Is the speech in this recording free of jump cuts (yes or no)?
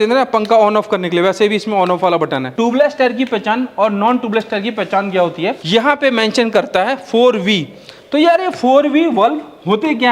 no